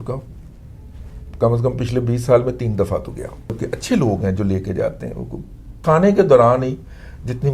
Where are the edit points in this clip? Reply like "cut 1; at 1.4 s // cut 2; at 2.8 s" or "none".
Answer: cut 1; at 3.6 s // cut 2; at 5.8 s

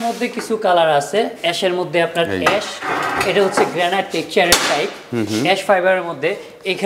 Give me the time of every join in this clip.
none

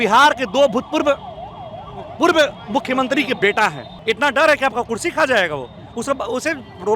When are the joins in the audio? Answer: cut 1; at 3.9 s

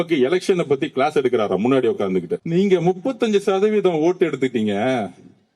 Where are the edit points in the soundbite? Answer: cut 1; at 2.4 s

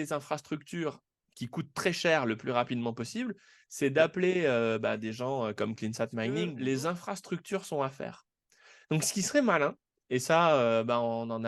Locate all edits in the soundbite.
cut 1; at 6.5 s

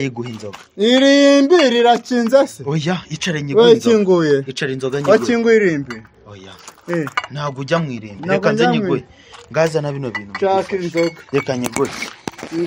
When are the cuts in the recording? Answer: none

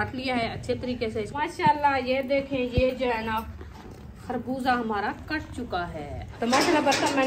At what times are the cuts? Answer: cut 1; at 1.4 s // cut 2; at 6.2 s

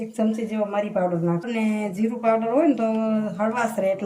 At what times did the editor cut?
cut 1; at 1.5 s

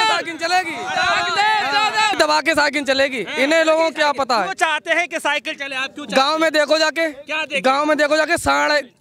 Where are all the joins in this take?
none

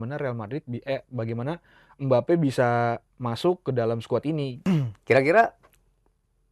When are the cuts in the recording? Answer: cut 1; at 4.5 s

